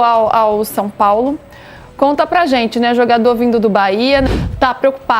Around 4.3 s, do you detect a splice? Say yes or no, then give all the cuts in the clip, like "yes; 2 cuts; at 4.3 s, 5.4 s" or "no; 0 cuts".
yes; 1 cut; at 4.3 s